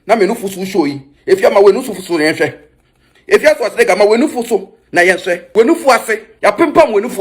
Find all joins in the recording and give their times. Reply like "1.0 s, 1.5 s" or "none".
5.4 s, 6.3 s